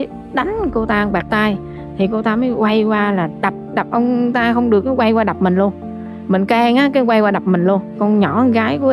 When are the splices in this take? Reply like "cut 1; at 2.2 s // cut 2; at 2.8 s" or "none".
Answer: none